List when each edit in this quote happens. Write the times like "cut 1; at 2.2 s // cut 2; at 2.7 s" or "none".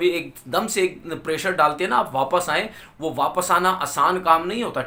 none